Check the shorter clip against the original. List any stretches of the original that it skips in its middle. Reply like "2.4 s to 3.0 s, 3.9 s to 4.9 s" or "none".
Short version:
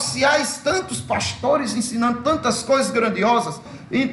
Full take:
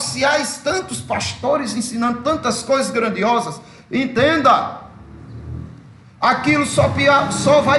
none

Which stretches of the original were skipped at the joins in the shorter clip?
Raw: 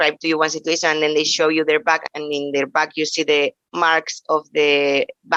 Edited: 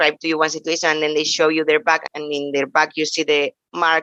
none

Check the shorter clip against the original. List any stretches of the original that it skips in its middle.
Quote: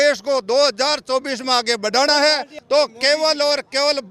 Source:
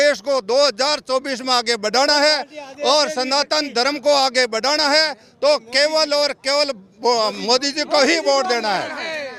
2.5 s to 5.2 s

